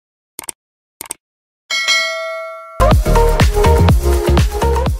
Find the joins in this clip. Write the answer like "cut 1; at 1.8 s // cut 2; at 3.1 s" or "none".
none